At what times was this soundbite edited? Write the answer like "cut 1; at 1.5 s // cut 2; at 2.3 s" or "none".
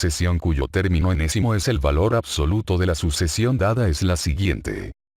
cut 1; at 2.7 s